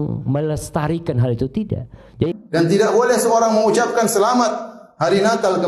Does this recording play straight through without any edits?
no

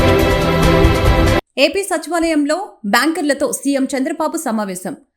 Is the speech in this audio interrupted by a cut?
yes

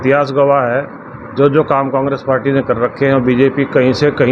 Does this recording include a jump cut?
no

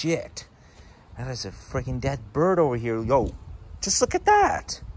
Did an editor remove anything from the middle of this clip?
no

